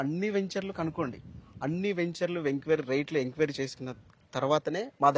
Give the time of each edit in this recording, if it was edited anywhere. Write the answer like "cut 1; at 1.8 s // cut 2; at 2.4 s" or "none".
none